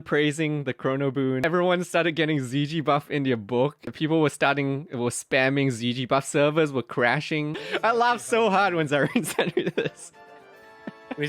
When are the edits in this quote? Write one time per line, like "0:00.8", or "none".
0:01.4
0:03.9
0:07.6